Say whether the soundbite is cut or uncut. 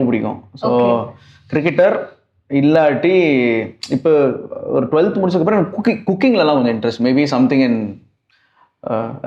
uncut